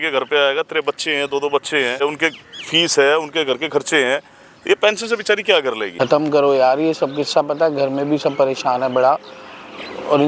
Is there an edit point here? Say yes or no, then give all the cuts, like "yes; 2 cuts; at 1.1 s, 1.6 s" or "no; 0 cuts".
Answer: yes; 2 cuts; at 2.0 s, 5.9 s